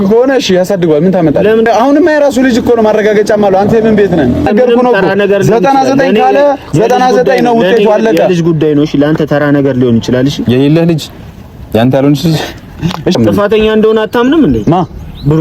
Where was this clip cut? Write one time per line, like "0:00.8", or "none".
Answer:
0:01.7
0:04.5
0:13.1